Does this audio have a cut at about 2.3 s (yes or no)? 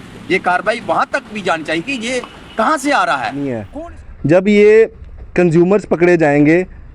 no